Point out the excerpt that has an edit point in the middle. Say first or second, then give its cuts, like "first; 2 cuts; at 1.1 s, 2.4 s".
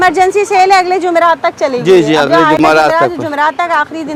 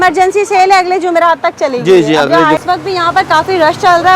second; 1 cut; at 2.6 s